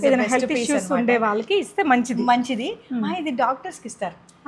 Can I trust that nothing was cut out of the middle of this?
yes; 0 cuts

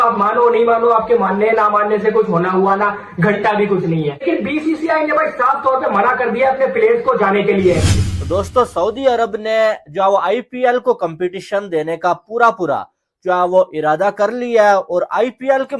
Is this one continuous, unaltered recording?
no; 2 cuts; at 4.2 s, 8.1 s

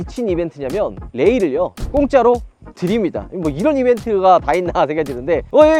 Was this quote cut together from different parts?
no; 0 cuts

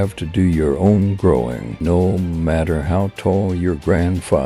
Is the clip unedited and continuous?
no; 1 cut; at 1.7 s

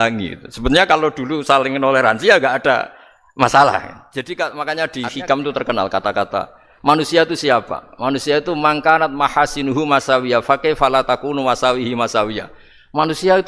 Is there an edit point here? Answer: yes; 1 cut; at 4.0 s

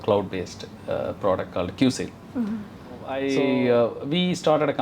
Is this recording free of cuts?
no; 1 cut; at 3.1 s

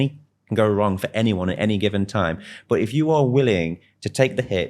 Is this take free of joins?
yes; 0 cuts

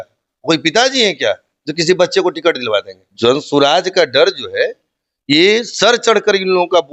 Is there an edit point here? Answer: yes; 1 cut; at 3.1 s

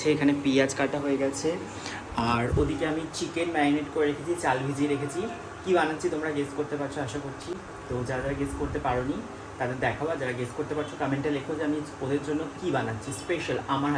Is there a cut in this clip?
no; 0 cuts

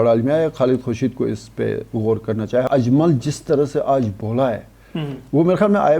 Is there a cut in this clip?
yes; 1 cut; at 2.7 s

